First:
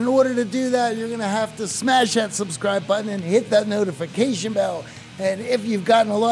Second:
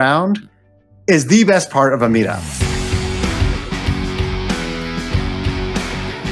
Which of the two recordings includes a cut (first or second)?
second